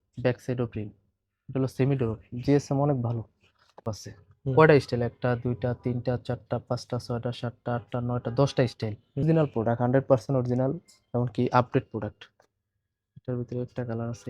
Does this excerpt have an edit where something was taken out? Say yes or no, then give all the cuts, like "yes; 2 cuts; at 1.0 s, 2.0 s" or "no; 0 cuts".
yes; 2 cuts; at 3.9 s, 9.2 s